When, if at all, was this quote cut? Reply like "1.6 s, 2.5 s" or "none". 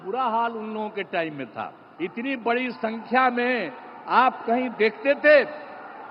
1.8 s